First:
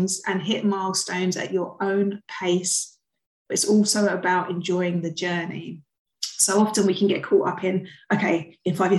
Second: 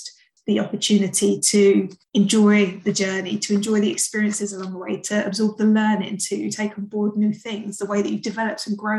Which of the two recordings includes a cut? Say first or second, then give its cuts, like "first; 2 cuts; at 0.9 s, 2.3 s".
second; 1 cut; at 2.0 s